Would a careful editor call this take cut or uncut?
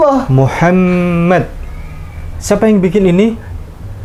uncut